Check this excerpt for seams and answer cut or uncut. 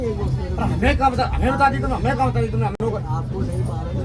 uncut